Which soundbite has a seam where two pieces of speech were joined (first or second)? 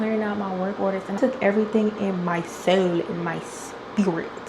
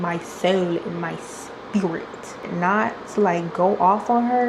first